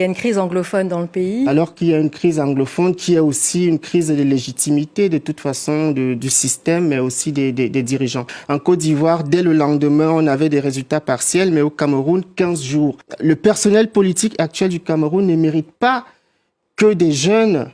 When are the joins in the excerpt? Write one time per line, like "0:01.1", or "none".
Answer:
0:08.3
0:13.1